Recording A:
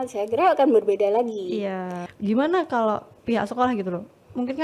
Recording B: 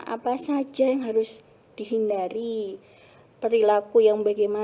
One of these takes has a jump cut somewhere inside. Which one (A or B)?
A